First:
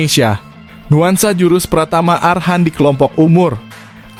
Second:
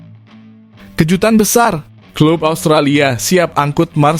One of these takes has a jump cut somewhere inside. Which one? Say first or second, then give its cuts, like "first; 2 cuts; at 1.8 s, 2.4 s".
second; 1 cut; at 1.0 s